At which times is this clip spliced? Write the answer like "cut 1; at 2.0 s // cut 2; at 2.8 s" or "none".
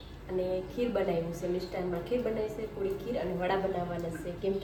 none